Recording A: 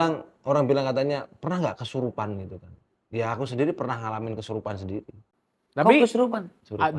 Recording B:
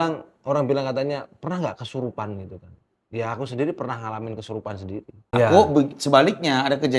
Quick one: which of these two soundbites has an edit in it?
B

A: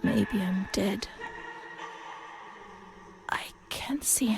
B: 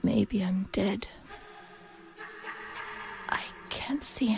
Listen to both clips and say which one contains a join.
A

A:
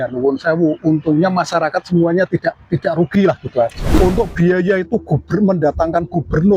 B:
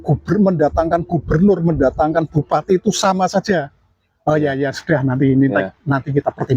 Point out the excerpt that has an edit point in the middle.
A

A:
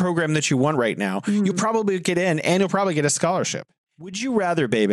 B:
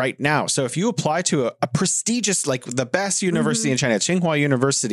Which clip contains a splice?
A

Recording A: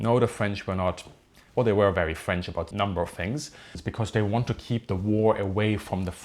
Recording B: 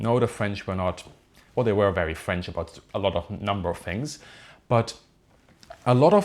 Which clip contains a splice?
A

